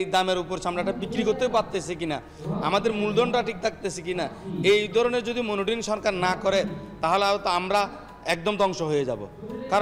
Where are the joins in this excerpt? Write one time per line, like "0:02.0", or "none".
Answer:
none